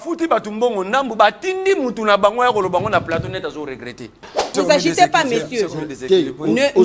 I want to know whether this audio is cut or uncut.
cut